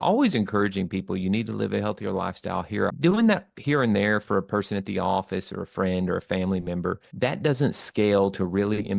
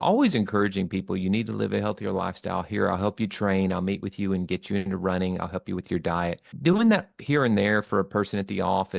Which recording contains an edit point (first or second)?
first